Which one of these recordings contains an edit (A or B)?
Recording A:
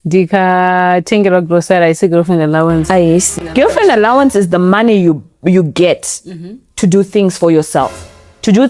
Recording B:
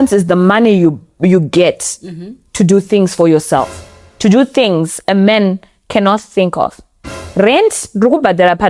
A